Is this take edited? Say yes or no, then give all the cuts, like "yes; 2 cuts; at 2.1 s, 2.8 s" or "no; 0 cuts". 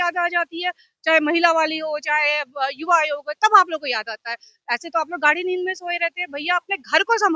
no; 0 cuts